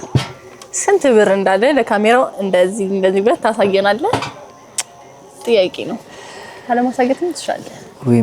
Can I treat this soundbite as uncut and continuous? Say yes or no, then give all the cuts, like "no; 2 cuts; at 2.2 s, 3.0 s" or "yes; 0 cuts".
yes; 0 cuts